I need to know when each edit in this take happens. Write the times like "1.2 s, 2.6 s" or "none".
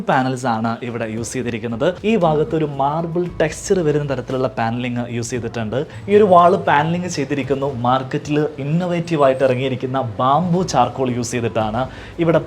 2.0 s, 6.0 s